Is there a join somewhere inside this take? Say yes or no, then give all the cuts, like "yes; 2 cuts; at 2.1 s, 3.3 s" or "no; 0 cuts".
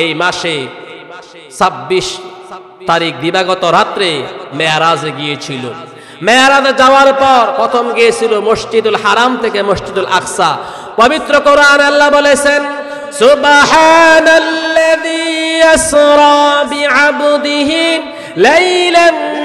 yes; 1 cut; at 7.6 s